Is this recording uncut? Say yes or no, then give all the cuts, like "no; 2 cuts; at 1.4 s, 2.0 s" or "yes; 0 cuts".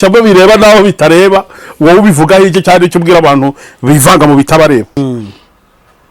no; 1 cut; at 4.9 s